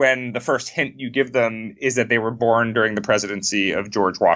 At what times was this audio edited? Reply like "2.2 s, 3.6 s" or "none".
none

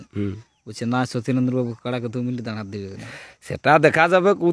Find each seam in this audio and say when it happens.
none

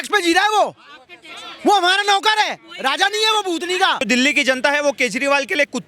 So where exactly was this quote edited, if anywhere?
4.0 s

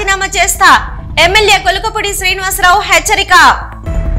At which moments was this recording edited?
none

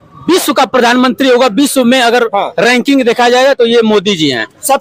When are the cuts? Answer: none

